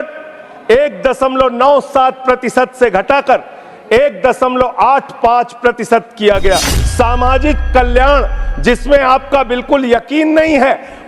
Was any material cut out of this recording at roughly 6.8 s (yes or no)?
yes